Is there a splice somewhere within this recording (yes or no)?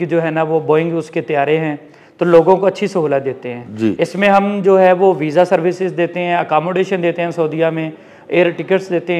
no